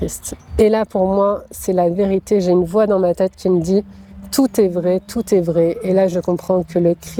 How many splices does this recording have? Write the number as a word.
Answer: zero